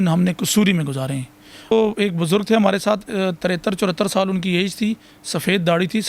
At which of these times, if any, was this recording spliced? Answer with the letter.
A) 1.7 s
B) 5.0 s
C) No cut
A